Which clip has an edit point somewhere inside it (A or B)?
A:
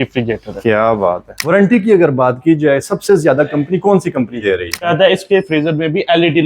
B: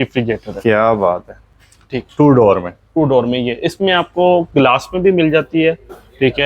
A